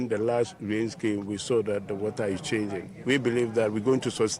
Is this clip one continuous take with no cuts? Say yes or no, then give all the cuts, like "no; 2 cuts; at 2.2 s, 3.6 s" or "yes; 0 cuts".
yes; 0 cuts